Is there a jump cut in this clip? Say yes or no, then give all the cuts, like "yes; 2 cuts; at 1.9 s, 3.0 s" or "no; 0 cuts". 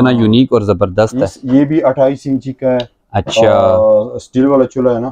no; 0 cuts